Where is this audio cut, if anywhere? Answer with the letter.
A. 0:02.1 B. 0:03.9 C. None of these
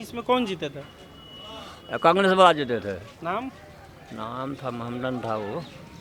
C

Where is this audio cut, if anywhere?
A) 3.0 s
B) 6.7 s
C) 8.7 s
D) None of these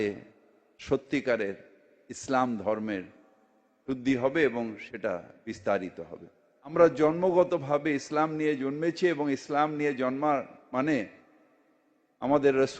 B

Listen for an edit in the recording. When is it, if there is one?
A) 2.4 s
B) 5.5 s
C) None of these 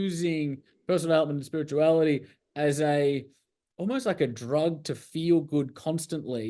C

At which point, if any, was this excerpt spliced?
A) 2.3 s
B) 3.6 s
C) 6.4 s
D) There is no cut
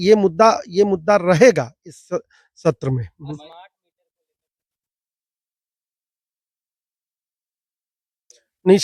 D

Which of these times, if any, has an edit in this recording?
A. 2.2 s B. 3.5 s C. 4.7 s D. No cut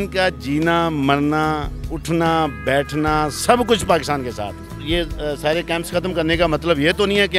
C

